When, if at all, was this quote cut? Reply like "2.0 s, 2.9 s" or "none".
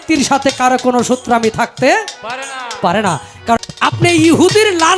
3.6 s